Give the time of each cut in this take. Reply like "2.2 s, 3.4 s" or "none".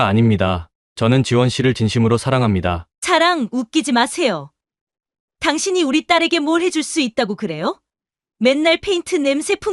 2.9 s